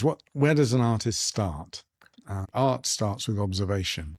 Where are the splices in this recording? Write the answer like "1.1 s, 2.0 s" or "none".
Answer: 2.5 s